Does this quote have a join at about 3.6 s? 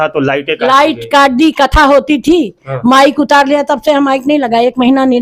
no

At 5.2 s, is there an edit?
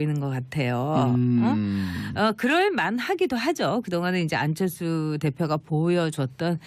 yes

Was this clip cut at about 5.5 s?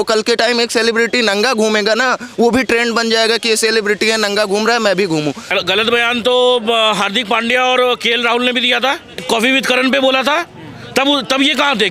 yes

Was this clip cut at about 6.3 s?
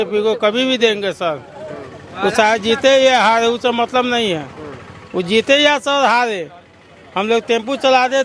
no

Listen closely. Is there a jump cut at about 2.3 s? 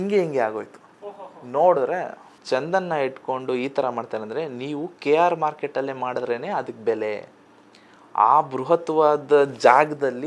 yes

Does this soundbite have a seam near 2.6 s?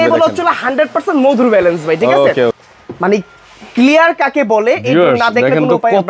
yes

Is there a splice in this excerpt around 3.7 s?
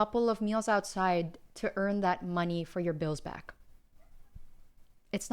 no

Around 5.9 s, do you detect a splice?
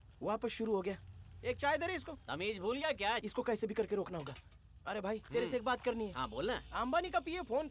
no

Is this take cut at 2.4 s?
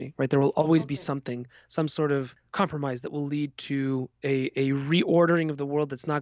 yes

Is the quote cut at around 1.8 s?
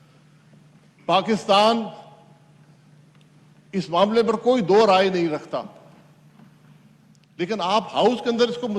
no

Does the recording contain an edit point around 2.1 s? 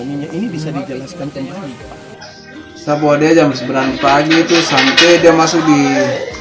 yes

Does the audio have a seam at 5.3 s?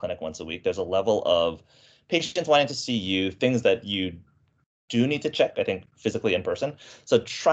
no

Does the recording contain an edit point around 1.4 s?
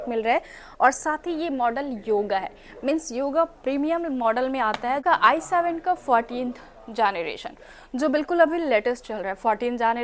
no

